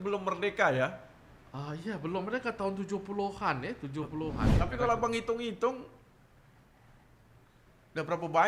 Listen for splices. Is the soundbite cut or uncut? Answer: cut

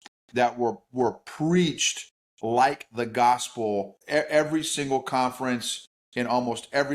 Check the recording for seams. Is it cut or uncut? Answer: cut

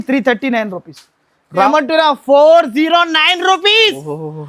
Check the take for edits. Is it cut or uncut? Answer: cut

